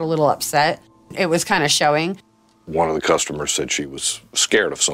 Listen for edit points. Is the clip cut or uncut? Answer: cut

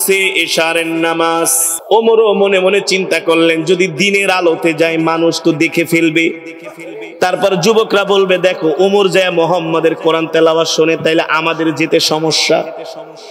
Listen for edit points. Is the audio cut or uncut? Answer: cut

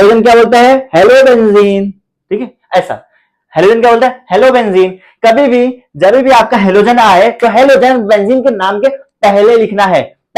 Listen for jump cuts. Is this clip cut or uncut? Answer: uncut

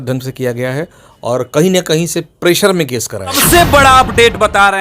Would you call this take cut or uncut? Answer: cut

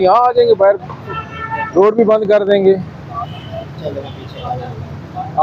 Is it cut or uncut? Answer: uncut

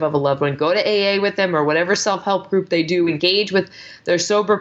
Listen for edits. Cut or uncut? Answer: uncut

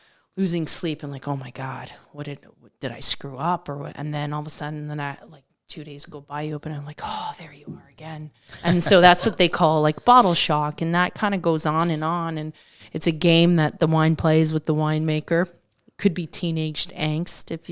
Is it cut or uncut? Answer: uncut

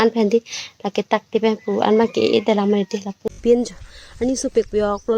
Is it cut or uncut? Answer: cut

